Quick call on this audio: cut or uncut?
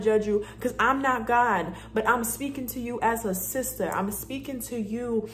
uncut